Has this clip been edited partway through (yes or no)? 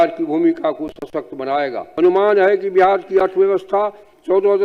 yes